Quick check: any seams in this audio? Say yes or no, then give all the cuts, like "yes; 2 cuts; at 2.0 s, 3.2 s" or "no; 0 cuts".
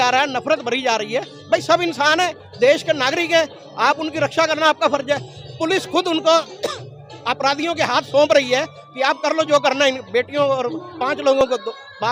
no; 0 cuts